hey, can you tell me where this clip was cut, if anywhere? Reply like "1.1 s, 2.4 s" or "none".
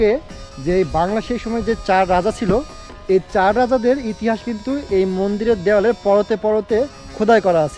none